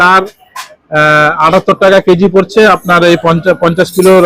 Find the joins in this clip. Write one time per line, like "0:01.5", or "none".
none